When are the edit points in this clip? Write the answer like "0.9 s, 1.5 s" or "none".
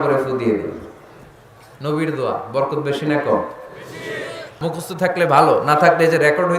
4.5 s